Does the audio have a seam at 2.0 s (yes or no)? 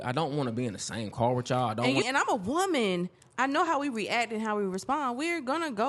yes